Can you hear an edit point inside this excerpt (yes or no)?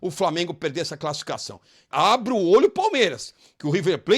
yes